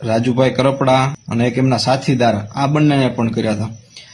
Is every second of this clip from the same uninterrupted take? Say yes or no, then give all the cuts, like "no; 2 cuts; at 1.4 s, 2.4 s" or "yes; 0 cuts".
no; 1 cut; at 1.2 s